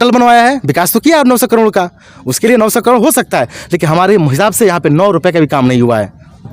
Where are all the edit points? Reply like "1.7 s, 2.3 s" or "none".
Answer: none